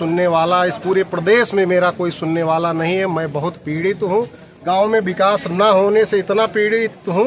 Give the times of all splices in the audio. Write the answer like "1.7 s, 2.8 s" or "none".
4.4 s